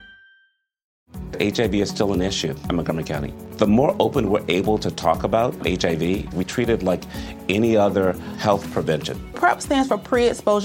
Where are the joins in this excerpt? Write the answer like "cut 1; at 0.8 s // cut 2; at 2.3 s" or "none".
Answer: cut 1; at 0.9 s